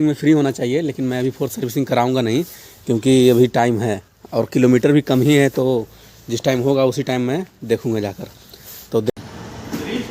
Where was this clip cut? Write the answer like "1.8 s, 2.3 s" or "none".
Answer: 9.1 s